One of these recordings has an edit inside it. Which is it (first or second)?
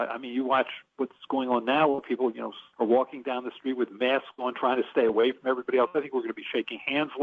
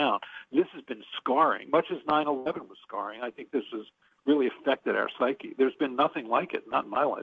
first